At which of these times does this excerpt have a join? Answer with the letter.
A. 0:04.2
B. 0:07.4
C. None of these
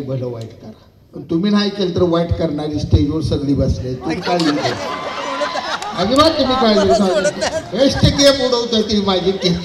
C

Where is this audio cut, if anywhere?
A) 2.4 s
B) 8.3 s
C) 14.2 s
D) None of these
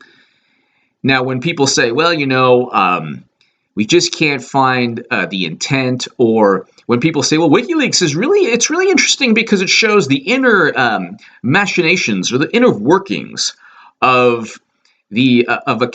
A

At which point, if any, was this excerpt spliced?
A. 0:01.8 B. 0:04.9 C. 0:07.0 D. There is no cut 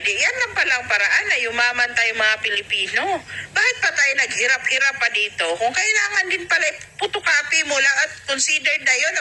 D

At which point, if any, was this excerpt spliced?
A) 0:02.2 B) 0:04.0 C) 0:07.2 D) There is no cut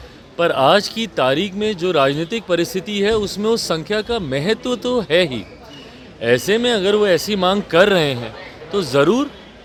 D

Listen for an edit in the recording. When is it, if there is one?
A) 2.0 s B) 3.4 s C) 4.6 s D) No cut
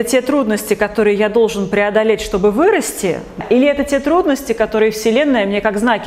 B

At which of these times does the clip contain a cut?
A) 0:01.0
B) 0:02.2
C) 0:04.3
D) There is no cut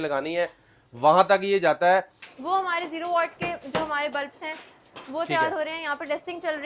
B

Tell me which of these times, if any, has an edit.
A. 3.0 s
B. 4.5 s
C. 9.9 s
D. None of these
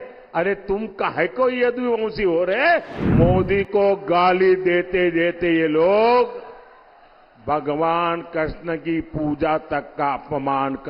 A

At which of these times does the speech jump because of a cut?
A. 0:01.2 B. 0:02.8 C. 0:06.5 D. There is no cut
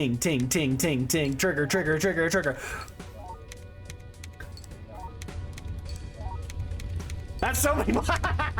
D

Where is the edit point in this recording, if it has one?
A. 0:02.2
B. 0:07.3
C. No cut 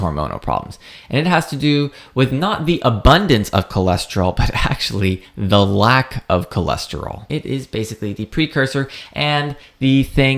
B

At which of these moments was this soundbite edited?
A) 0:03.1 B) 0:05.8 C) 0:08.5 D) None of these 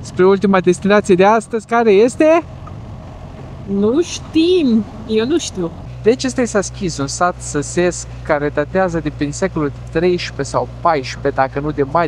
B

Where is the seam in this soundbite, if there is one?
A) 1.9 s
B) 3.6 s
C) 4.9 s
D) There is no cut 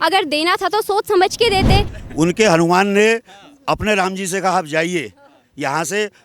A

